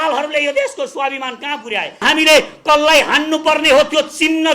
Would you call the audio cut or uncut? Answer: cut